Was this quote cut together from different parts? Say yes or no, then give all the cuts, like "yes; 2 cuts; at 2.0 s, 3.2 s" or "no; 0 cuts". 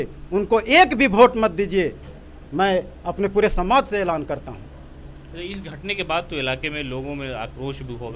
no; 0 cuts